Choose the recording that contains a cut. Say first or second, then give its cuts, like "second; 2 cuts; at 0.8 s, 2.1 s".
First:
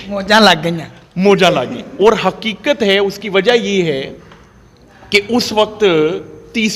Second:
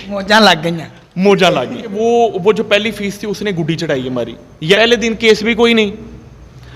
second; 2 cuts; at 1.9 s, 4.8 s